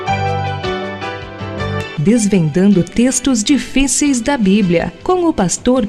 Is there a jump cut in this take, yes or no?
no